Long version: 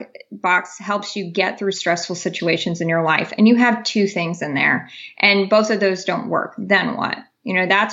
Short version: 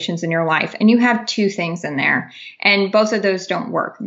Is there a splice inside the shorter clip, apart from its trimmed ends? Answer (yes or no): no